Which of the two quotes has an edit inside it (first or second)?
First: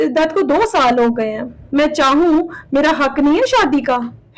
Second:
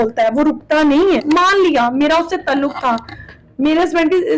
second